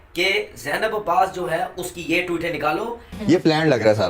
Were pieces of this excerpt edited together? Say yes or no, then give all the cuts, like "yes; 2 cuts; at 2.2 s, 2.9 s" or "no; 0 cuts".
yes; 1 cut; at 3.2 s